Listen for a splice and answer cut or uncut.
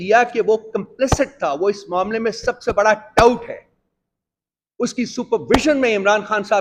uncut